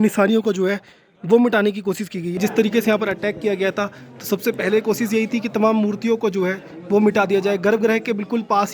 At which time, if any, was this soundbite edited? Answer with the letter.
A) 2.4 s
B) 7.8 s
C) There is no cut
A